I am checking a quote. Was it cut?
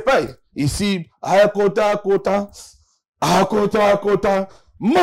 no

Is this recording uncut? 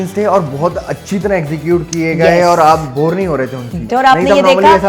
no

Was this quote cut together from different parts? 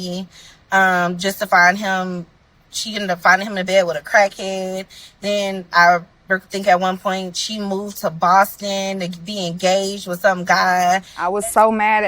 yes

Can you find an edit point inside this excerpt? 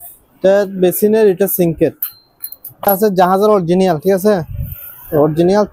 no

